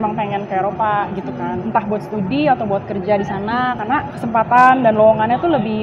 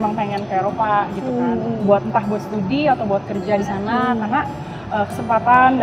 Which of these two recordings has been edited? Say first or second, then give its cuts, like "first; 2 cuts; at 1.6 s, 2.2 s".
first; 2 cuts; at 1.6 s, 3.7 s